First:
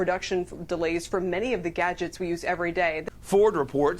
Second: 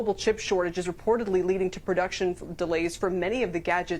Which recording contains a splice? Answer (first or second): first